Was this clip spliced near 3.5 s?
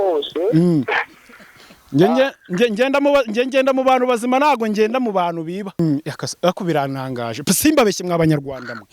no; 1 cut; at 5.8 s

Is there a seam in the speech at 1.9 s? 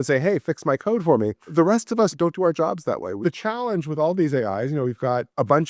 no; 1 cut; at 3.2 s

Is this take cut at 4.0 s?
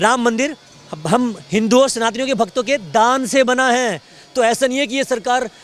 no; 0 cuts

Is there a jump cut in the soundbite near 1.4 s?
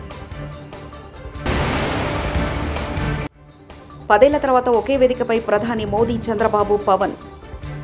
yes; 1 cut; at 1.4 s

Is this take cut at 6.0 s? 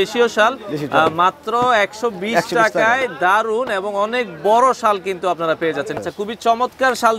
yes; 1 cut; at 6.0 s

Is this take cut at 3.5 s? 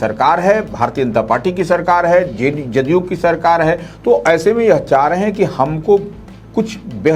no; 0 cuts

